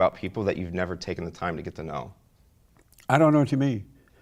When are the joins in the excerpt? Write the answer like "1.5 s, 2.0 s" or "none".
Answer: none